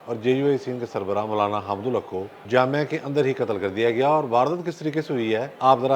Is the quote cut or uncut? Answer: cut